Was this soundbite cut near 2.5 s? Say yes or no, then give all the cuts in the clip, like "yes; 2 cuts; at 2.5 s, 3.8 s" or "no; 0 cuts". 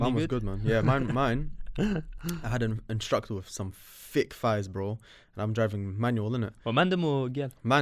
no; 0 cuts